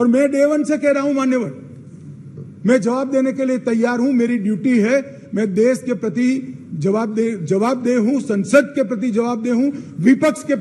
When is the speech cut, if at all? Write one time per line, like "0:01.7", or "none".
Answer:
none